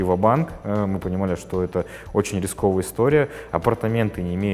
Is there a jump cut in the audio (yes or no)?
no